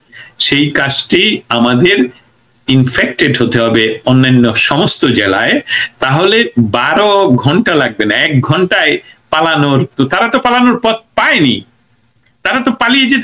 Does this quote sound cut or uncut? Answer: uncut